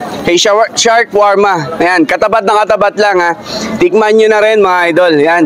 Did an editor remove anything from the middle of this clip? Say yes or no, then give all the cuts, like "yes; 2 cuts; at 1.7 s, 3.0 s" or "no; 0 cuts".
no; 0 cuts